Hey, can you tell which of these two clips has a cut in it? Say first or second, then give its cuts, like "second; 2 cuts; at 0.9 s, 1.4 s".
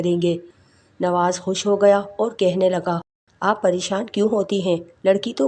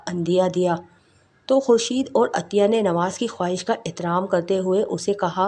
first; 1 cut; at 3.2 s